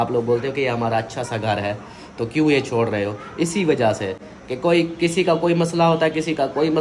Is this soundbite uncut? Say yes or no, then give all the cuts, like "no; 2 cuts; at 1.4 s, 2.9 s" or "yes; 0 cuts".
yes; 0 cuts